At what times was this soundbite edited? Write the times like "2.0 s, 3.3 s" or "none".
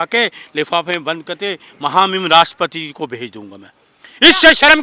none